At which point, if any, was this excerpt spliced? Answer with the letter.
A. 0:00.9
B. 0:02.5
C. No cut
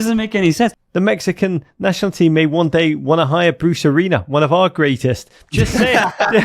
A